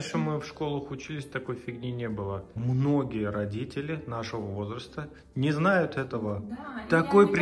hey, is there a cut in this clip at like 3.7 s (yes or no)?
no